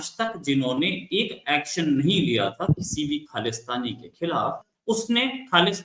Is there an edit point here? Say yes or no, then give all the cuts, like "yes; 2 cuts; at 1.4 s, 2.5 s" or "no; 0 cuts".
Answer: yes; 1 cut; at 4.7 s